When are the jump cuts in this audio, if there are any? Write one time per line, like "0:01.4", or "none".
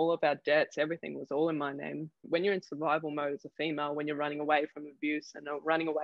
0:02.2